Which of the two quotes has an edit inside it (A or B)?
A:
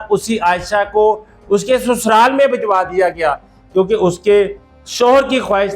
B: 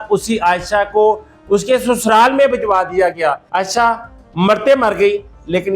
B